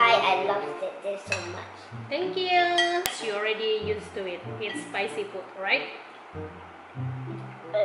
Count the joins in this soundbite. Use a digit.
1